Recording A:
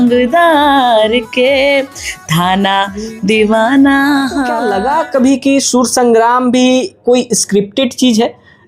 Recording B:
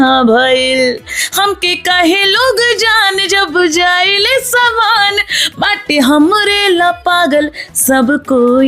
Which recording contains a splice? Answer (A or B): A